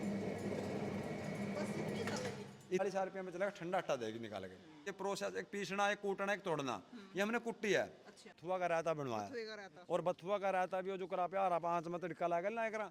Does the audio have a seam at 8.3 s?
yes; 3 cuts; at 2.8 s, 4.9 s, 8.3 s

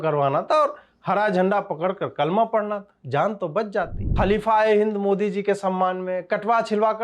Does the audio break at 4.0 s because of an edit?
yes; 1 cut; at 4.0 s

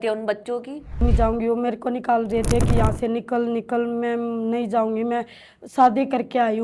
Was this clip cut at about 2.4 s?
no; 1 cut; at 1.0 s

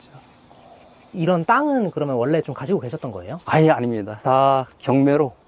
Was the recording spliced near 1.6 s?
no; 1 cut; at 4.1 s

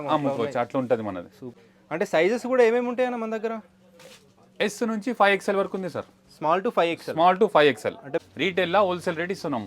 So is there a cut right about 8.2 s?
yes; 2 cuts; at 1.6 s, 8.2 s

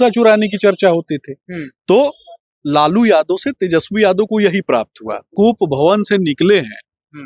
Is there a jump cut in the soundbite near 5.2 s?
yes; 1 cut; at 5.2 s

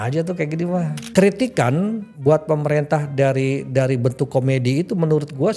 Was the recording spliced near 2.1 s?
yes; 2 cuts; at 1.0 s, 2.1 s

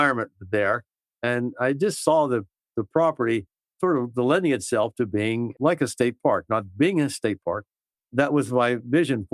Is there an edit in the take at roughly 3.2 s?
no; 2 cuts; at 5.5 s, 7.8 s

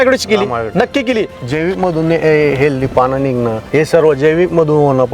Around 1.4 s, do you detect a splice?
yes; 2 cuts; at 1.4 s, 3.6 s

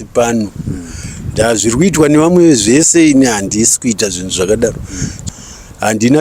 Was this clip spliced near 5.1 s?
yes; 1 cut; at 5.1 s

